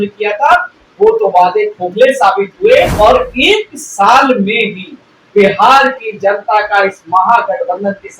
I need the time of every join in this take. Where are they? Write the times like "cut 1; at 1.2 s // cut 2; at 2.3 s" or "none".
cut 1; at 2.9 s